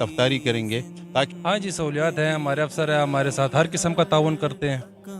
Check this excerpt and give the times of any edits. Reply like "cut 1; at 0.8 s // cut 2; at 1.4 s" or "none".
cut 1; at 1.3 s